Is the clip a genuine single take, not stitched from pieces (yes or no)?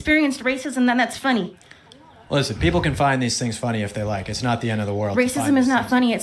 yes